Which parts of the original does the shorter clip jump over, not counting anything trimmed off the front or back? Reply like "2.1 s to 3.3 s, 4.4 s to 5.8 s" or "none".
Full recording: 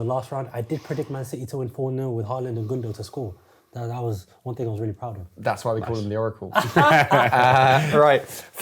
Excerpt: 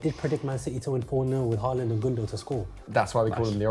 3.4 s to 5.3 s